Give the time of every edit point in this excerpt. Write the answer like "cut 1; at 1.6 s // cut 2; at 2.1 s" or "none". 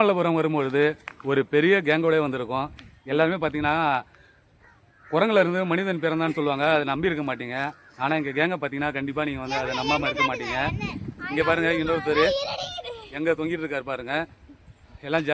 none